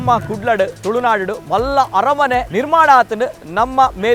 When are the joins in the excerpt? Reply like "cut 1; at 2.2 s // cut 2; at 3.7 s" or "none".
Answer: cut 1; at 2.5 s

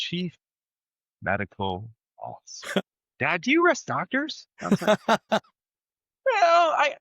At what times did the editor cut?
cut 1; at 2.8 s

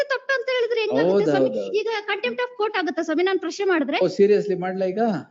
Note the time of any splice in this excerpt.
none

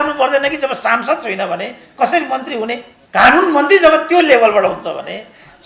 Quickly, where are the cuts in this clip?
cut 1; at 2.9 s

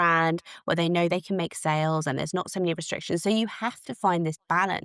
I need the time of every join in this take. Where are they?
none

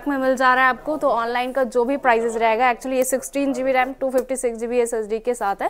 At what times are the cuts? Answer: none

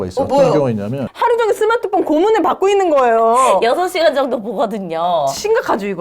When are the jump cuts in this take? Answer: cut 1; at 1.1 s

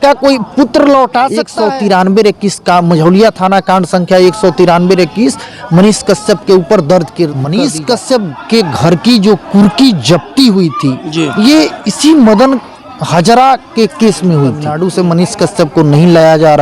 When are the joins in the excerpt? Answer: cut 1; at 1.5 s // cut 2; at 7.4 s // cut 3; at 14.7 s

